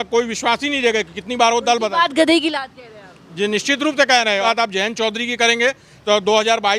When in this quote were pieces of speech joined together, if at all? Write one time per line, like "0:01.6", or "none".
0:04.4